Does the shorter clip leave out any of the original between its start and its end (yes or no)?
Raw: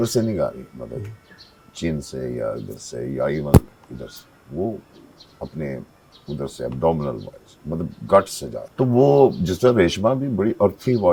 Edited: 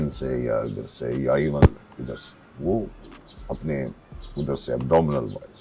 no